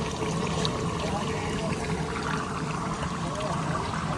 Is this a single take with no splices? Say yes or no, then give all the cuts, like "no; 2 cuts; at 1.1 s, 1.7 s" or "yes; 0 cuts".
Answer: yes; 0 cuts